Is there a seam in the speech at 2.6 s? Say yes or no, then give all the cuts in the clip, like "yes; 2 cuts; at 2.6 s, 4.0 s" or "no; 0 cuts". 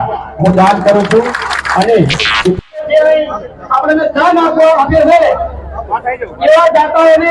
yes; 1 cut; at 2.6 s